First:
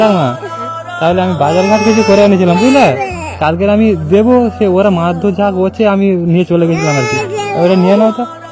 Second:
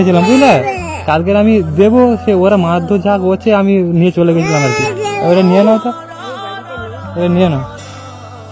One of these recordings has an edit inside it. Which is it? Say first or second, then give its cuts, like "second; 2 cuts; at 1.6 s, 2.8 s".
second; 1 cut; at 7.6 s